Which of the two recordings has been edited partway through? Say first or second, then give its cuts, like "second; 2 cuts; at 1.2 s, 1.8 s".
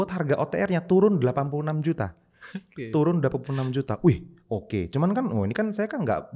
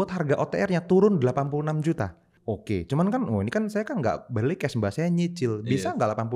second; 1 cut; at 2.3 s